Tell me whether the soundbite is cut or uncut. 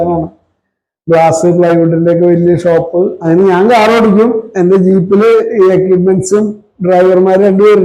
cut